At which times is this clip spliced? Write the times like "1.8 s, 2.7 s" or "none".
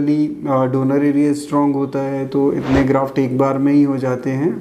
none